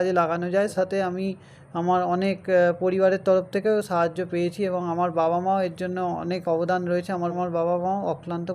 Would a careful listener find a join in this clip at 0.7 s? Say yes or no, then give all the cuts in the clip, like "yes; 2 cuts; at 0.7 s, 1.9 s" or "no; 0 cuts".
yes; 2 cuts; at 0.7 s, 7.3 s